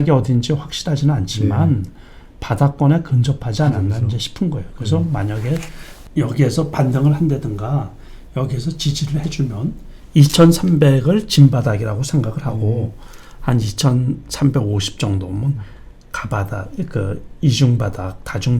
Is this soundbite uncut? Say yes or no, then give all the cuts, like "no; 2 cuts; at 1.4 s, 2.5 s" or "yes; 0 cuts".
yes; 0 cuts